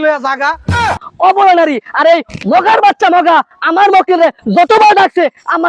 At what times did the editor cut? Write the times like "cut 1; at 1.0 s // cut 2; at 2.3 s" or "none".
cut 1; at 1.0 s